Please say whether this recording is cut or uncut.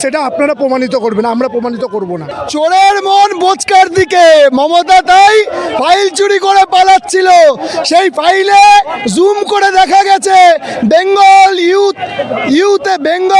cut